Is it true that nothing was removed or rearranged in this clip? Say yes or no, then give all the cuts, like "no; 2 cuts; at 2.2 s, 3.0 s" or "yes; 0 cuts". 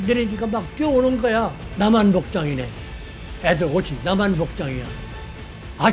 no; 1 cut; at 1.6 s